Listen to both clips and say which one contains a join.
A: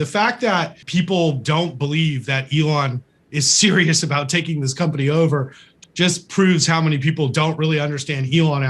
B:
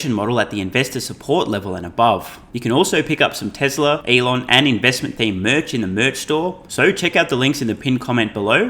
B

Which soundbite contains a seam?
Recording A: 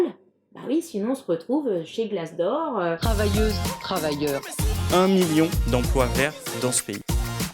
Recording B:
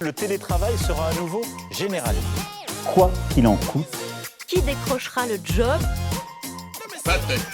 A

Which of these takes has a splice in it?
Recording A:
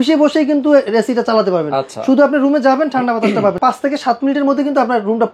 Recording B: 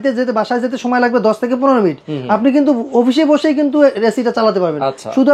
A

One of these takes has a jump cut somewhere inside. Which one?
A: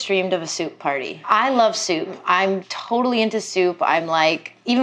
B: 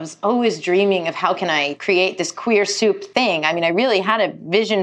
A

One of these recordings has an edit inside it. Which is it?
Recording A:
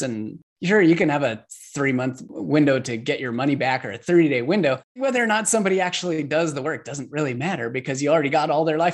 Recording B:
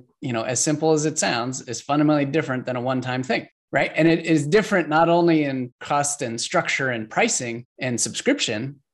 A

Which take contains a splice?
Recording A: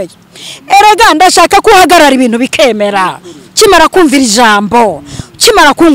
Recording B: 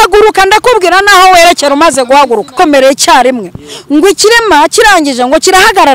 B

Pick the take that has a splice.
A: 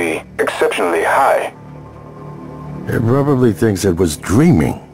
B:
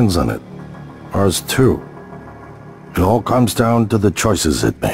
A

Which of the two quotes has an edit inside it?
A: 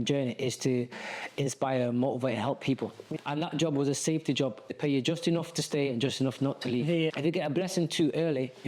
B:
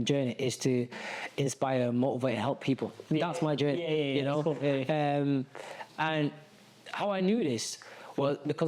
A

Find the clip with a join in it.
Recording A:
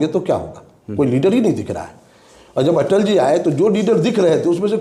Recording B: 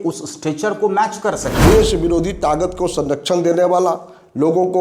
B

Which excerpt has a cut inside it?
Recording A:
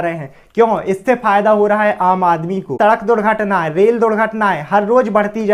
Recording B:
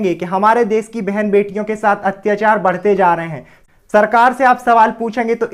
A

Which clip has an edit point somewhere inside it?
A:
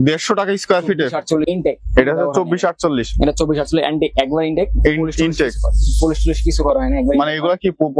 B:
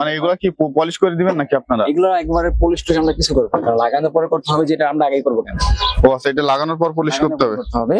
A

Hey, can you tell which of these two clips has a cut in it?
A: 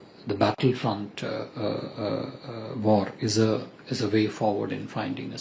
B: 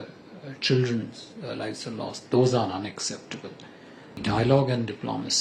B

